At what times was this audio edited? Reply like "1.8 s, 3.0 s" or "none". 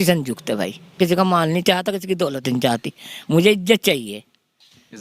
1.0 s